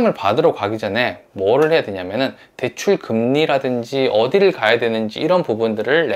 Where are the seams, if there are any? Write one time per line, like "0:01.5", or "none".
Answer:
none